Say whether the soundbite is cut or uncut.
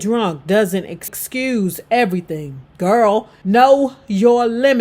cut